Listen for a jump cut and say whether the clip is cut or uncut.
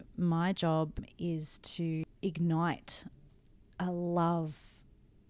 cut